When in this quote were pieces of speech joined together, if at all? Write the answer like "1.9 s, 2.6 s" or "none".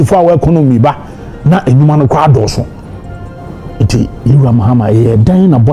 none